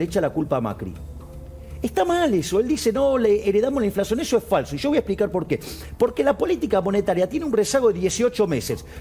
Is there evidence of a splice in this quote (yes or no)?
no